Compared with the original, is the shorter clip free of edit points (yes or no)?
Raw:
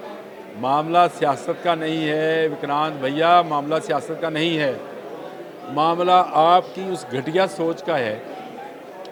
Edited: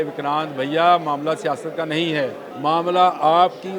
no